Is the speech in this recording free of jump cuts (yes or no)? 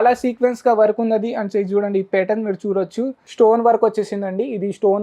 no